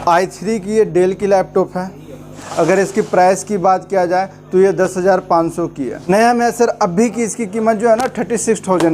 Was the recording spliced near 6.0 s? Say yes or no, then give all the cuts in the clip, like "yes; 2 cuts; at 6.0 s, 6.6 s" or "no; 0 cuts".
yes; 2 cuts; at 2.3 s, 6.0 s